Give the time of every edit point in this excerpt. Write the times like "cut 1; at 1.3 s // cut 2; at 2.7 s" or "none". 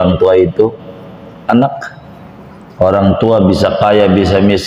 none

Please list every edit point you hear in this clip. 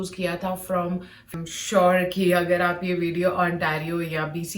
cut 1; at 1.3 s

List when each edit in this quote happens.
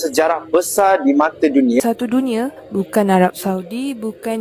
cut 1; at 1.8 s

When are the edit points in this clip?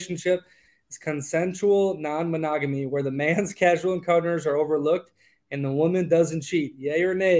none

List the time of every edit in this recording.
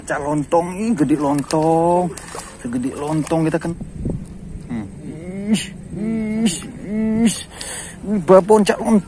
cut 1; at 3.8 s

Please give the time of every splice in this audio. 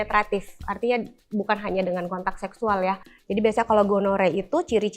cut 1; at 3.1 s

